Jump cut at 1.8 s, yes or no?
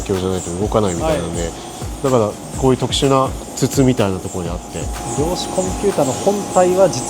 yes